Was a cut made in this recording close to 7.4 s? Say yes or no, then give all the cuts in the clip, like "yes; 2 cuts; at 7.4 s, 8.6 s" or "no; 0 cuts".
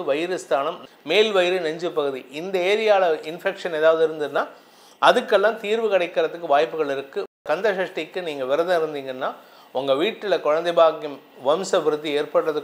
yes; 1 cut; at 7.4 s